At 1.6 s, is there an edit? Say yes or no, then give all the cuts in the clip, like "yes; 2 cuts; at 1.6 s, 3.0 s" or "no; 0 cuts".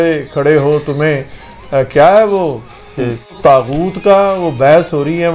no; 1 cut; at 3.3 s